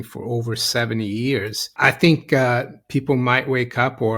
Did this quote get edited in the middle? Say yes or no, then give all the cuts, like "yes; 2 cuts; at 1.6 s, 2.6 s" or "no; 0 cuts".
yes; 1 cut; at 1.7 s